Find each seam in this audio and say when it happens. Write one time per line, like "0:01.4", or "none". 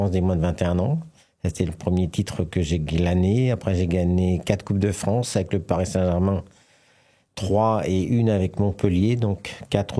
none